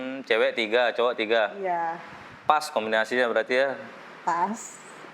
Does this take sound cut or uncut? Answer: uncut